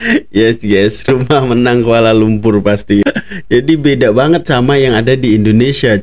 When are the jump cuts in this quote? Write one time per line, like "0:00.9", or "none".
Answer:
0:03.0